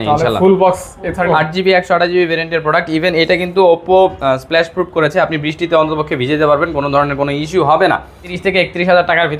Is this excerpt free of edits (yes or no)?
no